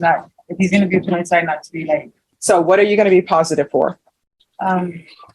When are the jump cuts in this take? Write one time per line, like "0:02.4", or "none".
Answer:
0:02.2